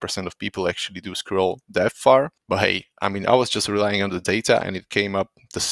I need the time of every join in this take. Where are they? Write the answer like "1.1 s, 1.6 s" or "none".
2.4 s